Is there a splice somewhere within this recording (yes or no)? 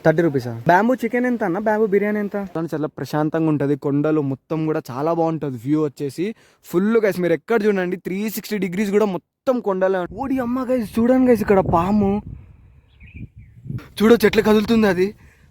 yes